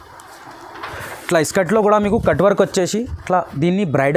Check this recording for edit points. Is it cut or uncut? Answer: uncut